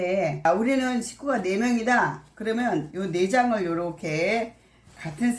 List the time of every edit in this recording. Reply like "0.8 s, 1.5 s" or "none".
none

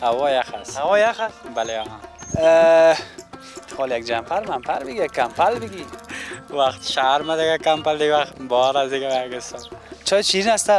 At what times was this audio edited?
9.9 s

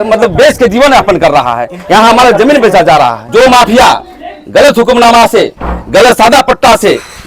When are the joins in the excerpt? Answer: 3.2 s

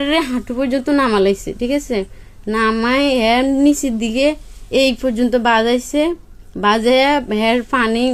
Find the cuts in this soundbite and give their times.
none

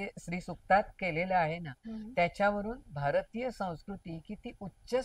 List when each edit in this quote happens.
none

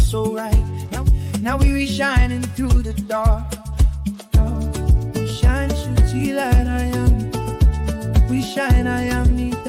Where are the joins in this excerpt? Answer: none

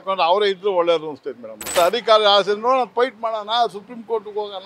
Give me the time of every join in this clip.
1.7 s

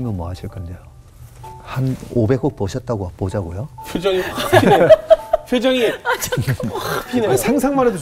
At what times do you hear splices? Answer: 3.7 s

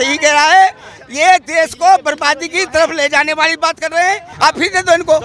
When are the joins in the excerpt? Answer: 4.3 s

